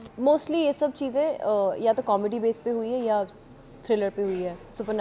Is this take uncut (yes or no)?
yes